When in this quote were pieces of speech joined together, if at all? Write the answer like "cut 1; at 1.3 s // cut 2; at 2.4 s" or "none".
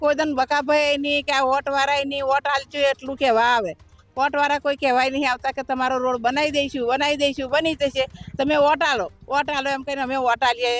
none